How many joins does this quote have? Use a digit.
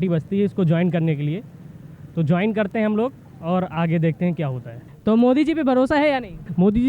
0